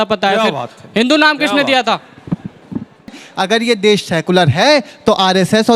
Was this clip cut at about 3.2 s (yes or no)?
yes